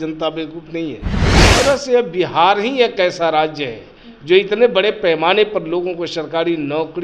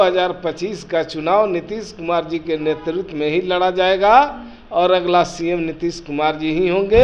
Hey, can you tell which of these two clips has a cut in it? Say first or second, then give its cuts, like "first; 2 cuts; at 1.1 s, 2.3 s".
first; 1 cut; at 1.4 s